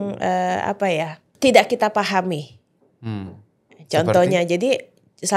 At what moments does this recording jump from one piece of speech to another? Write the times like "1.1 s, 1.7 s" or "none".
1.2 s

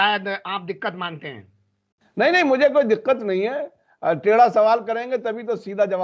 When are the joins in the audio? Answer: none

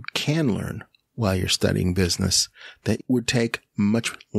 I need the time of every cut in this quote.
3.0 s

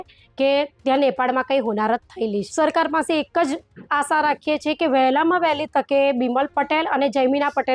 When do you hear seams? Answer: 2.5 s

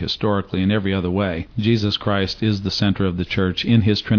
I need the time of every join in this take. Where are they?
1.5 s

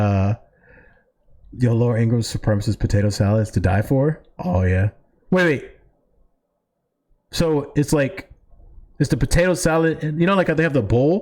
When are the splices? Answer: 1.7 s

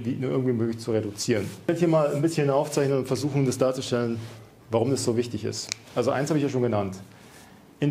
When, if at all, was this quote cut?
1.7 s

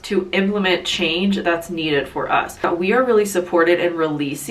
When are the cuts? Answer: 2.6 s

